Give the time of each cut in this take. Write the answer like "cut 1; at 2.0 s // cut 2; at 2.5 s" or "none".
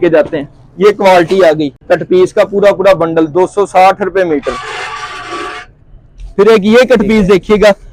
none